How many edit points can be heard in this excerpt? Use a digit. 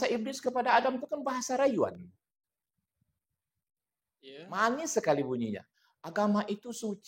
0